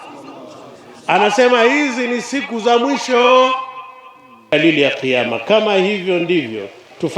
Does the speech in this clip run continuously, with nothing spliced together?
no; 1 cut; at 4.5 s

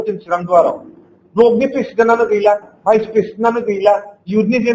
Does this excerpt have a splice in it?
no; 0 cuts

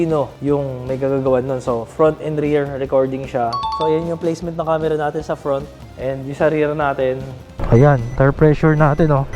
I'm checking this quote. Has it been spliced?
yes; 2 cuts; at 5.8 s, 7.6 s

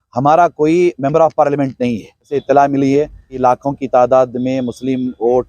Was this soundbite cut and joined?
yes; 2 cuts; at 2.4 s, 3.4 s

